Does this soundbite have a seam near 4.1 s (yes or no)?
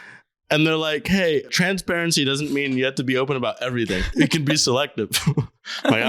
yes